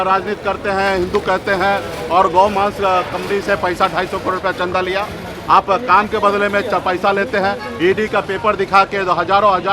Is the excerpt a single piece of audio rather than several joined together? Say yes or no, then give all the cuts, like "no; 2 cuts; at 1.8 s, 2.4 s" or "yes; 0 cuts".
yes; 0 cuts